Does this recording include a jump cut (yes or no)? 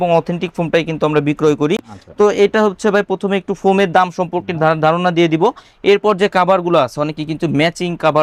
no